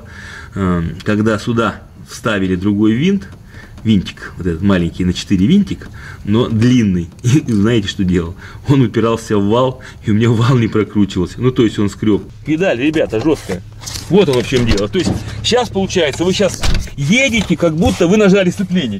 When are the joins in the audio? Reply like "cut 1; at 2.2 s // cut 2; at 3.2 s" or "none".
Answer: cut 1; at 12.3 s